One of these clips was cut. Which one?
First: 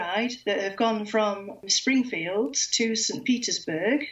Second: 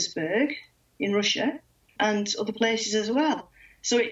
second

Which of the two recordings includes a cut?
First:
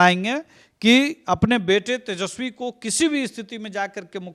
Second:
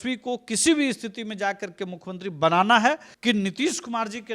second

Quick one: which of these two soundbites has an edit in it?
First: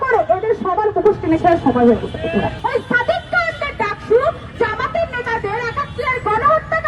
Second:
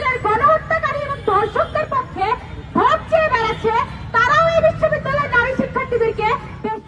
first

